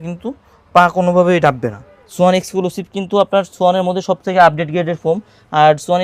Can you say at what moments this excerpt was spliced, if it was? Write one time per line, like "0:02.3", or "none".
0:02.0